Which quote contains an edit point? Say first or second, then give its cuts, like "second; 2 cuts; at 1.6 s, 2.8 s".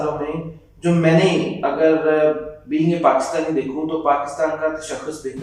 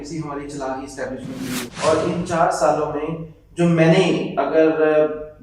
second; 1 cut; at 1.7 s